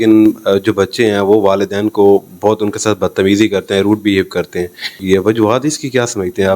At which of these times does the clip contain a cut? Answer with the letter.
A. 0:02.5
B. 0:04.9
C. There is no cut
B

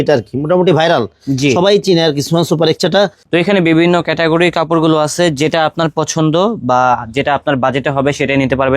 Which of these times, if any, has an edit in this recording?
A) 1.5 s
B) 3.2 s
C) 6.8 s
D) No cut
B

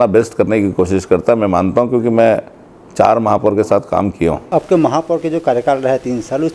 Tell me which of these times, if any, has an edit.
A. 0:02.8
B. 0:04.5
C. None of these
B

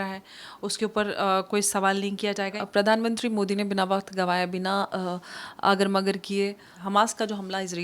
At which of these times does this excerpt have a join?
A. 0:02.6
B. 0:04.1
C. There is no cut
A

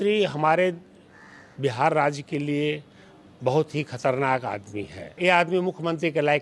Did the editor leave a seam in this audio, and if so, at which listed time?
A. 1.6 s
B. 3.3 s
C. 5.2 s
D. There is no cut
C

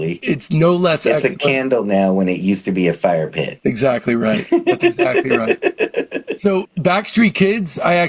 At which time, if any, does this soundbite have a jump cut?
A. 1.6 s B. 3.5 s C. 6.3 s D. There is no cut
D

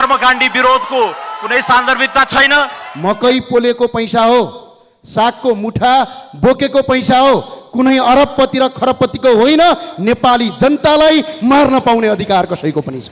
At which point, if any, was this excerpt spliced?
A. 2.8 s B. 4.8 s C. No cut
A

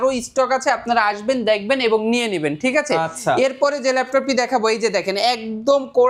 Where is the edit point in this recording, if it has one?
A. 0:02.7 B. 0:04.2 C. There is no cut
C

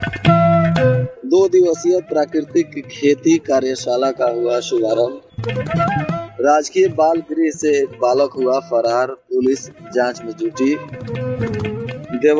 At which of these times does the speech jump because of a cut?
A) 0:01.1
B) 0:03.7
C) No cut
A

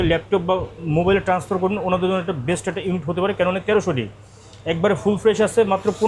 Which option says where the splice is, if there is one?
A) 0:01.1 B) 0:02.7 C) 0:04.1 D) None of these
D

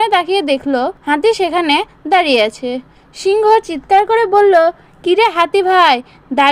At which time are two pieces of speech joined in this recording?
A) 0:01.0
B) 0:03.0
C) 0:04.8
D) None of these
A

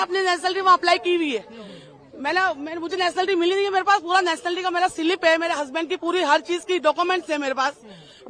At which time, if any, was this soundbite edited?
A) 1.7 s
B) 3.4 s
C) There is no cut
C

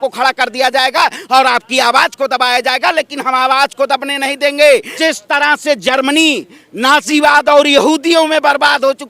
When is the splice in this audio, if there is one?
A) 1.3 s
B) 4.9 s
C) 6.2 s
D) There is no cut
B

